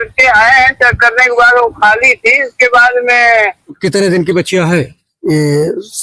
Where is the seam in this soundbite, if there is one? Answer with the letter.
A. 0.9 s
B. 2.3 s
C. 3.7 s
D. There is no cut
C